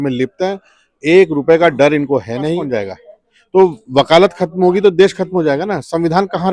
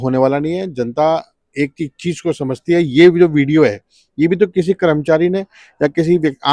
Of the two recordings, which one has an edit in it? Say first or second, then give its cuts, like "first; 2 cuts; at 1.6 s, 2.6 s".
first; 1 cut; at 2.6 s